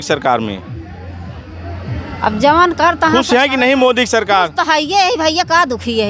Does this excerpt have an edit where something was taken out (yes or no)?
no